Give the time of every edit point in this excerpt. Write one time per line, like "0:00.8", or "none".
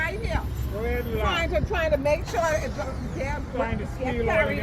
none